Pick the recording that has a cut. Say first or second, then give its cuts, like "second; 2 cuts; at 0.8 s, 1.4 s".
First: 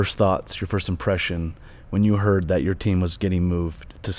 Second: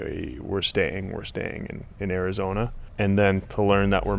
second; 1 cut; at 2.8 s